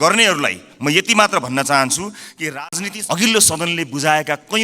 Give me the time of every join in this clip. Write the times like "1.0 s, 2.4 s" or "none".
2.5 s